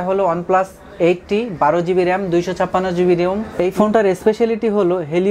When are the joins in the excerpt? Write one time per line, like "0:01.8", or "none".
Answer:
0:03.6